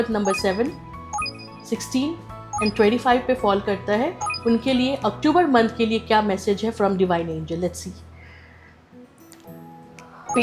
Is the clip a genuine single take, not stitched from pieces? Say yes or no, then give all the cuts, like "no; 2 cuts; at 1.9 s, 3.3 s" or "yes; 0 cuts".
yes; 0 cuts